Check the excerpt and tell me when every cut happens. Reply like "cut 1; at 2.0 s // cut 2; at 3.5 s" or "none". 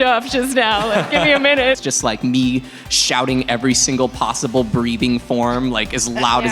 cut 1; at 1.8 s

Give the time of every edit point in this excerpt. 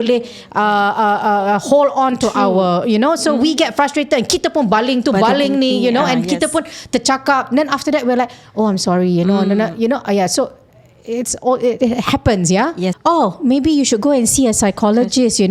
cut 1; at 13.0 s

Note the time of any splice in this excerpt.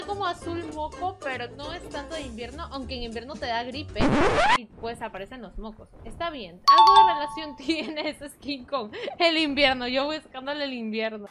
none

